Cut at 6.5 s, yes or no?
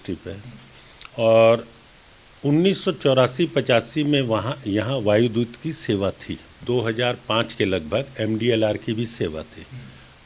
yes